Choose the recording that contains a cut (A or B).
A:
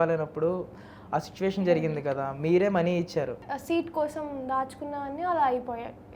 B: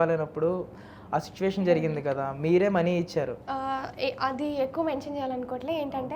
A